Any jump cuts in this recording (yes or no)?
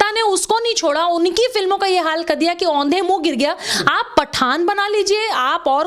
no